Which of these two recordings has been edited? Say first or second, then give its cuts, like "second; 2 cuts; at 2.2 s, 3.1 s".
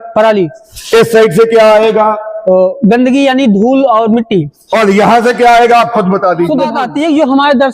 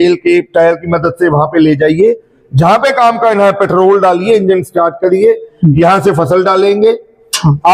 first; 1 cut; at 6.8 s